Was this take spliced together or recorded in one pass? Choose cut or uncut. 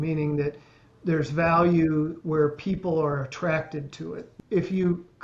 cut